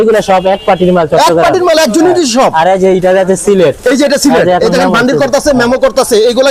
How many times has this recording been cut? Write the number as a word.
zero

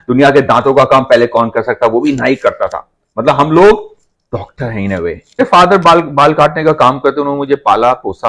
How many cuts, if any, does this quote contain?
one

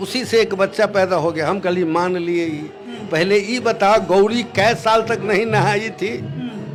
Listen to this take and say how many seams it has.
zero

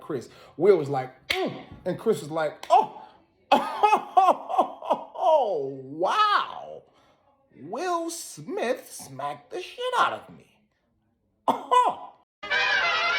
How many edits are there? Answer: one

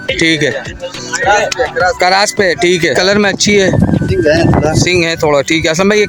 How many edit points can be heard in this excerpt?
one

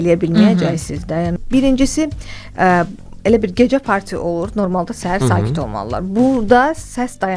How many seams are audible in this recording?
one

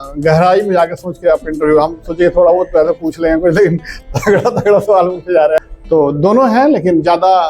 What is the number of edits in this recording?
one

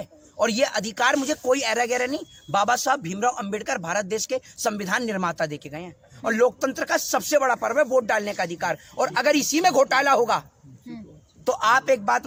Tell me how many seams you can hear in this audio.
zero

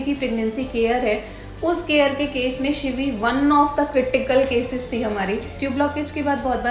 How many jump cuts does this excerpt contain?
one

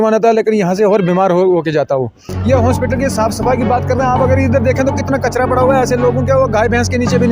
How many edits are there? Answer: one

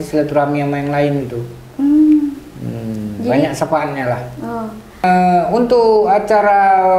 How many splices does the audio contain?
one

